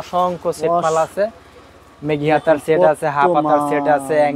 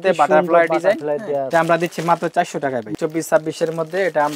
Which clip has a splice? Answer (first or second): second